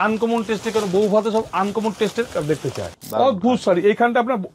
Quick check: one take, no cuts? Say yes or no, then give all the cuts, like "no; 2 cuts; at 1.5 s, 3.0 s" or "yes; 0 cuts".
no; 1 cut; at 2.9 s